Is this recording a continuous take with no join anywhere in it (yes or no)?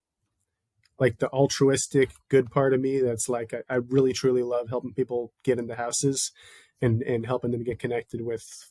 yes